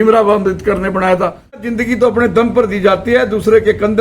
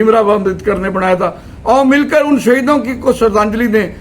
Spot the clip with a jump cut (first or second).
first